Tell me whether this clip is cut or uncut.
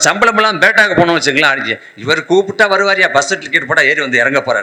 uncut